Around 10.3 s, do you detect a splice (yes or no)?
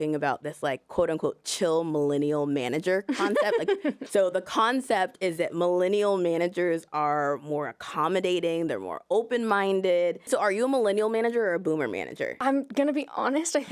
yes